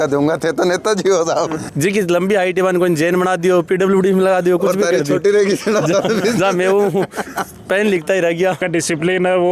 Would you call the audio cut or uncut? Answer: cut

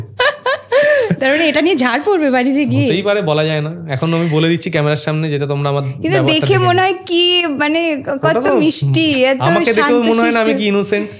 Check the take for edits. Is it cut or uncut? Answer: uncut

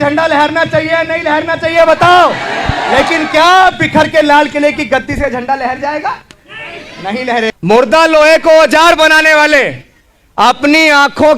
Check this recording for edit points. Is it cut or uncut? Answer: cut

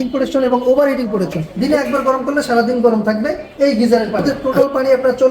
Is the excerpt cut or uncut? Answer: cut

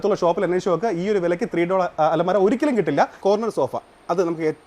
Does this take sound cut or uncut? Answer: cut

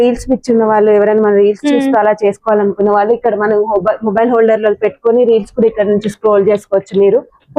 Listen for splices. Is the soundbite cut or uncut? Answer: uncut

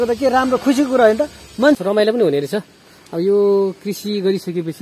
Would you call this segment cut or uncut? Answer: cut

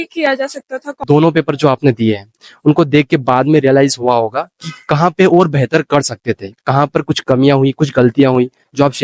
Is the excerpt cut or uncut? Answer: cut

